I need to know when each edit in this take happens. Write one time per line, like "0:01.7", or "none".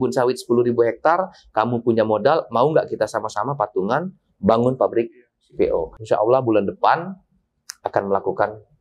0:05.9